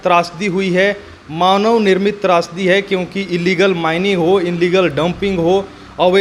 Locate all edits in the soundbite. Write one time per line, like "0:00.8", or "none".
none